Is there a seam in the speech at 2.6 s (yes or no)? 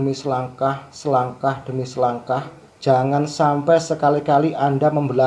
yes